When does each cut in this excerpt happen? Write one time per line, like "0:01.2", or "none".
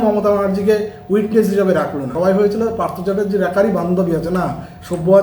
0:02.1